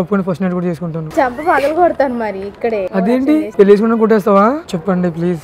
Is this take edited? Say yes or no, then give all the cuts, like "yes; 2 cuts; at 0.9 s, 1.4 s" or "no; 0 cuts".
no; 0 cuts